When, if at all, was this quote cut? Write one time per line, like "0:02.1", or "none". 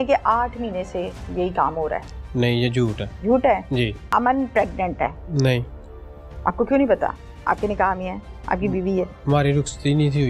0:03.1
0:04.0
0:05.2

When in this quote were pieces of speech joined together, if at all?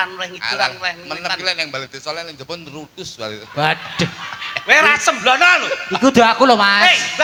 none

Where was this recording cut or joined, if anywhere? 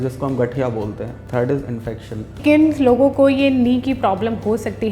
0:01.2
0:02.4

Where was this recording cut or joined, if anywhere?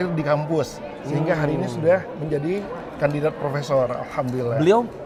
none

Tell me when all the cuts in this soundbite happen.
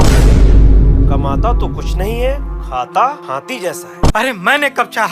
0:04.1

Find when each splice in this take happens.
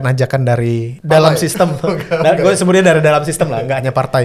0:00.9

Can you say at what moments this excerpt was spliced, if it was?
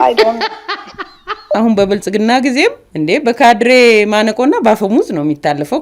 0:01.6

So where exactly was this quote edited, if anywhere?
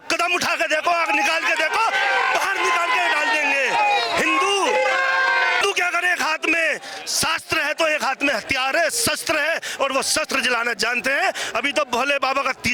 0:05.6

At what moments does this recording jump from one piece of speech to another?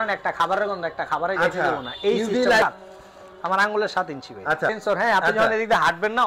0:02.6
0:04.8

